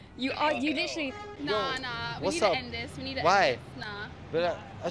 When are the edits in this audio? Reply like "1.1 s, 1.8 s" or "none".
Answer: 1.3 s